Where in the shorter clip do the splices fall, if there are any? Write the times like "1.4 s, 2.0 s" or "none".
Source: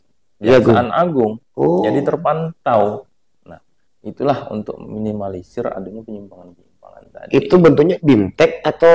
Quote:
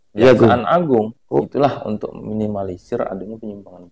1.4 s